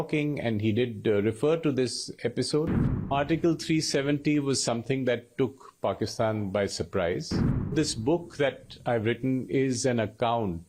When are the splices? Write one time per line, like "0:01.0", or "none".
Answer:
0:03.1
0:07.7